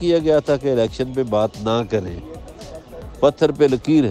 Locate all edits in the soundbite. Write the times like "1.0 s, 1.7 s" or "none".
none